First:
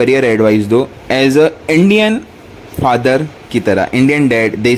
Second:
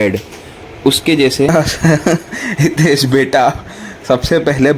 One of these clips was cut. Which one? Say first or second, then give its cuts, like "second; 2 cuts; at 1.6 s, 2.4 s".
second; 1 cut; at 1.5 s